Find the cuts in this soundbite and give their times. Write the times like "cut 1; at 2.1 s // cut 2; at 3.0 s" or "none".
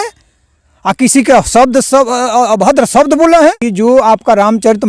cut 1; at 3.6 s

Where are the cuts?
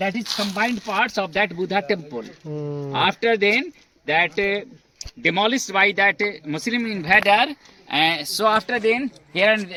none

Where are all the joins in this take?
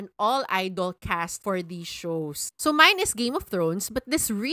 cut 1; at 1.3 s // cut 2; at 2.5 s

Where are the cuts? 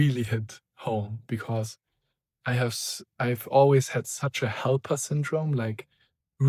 none

